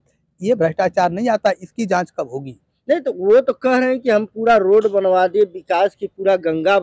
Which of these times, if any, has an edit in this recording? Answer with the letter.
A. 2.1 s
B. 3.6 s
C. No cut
C